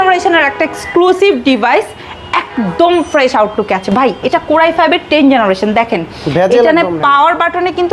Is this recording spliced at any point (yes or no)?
no